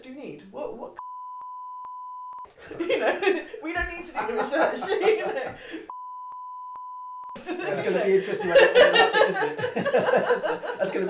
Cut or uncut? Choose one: uncut